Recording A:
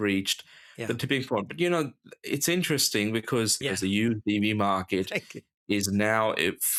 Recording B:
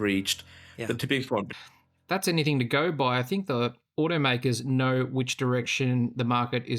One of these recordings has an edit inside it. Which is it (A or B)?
B